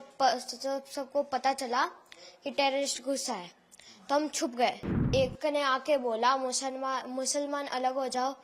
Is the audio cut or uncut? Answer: cut